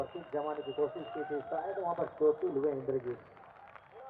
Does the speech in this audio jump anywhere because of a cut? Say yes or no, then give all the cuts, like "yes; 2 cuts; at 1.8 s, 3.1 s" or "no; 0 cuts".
no; 0 cuts